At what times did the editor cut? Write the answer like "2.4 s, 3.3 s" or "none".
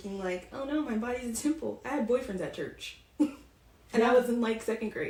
none